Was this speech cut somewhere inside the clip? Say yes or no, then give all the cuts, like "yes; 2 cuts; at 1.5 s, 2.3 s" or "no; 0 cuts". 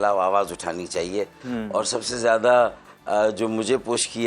no; 0 cuts